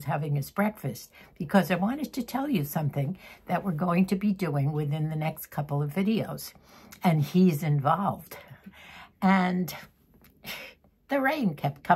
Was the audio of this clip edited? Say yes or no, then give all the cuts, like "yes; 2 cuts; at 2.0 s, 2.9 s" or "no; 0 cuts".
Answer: no; 0 cuts